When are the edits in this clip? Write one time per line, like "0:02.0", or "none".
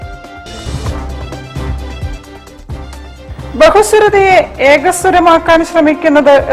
0:02.8